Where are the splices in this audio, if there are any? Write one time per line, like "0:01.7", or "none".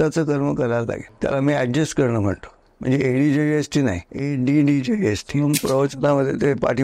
0:01.1
0:02.7
0:04.1
0:05.5